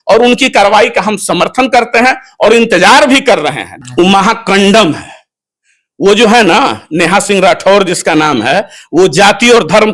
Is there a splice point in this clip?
yes; 1 cut; at 3.6 s

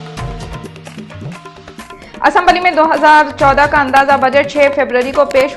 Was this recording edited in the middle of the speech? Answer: no; 0 cuts

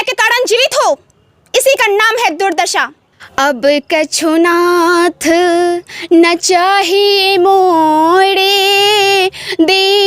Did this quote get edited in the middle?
yes; 1 cut; at 2.9 s

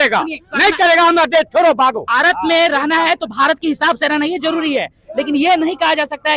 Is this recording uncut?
no; 1 cut; at 2.0 s

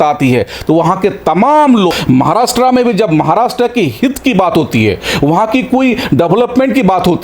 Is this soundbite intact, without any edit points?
no; 1 cut; at 1.9 s

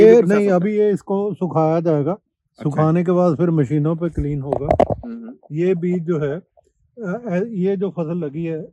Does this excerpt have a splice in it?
no; 0 cuts

